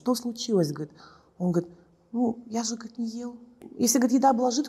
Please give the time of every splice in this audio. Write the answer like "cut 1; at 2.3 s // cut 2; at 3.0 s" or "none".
cut 1; at 3.6 s